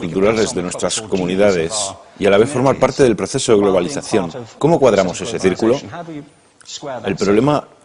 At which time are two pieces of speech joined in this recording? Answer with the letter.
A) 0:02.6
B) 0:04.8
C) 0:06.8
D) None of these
B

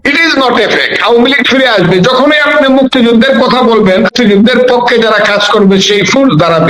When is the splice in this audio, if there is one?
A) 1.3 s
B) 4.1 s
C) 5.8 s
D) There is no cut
B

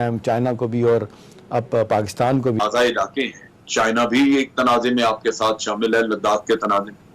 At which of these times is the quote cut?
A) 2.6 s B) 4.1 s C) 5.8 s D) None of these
A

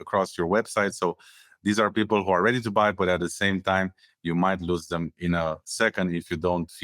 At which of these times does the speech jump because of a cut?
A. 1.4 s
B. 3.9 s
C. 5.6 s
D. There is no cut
D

